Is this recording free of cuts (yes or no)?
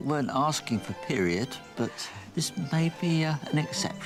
yes